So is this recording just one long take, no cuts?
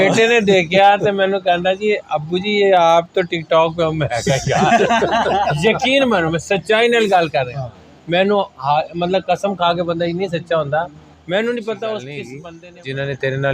no; 1 cut; at 12.4 s

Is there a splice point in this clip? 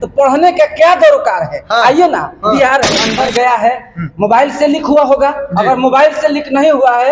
yes; 1 cut; at 3.0 s

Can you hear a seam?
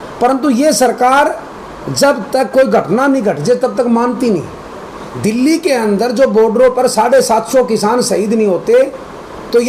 no; 0 cuts

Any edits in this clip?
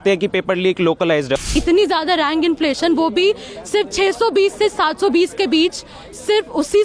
yes; 1 cut; at 1.5 s

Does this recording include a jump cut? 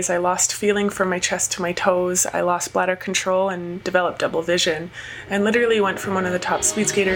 no; 0 cuts

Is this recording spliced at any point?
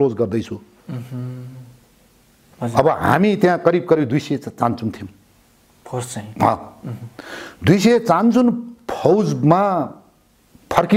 no; 0 cuts

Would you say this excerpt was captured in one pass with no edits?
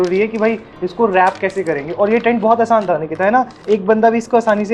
yes; 0 cuts

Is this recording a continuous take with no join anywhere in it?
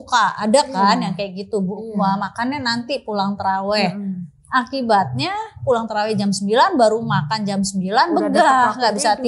yes; 0 cuts

